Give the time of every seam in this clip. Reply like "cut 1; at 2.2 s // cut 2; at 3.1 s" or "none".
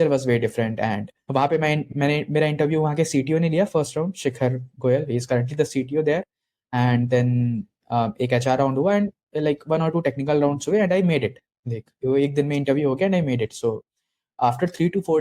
cut 1; at 1.9 s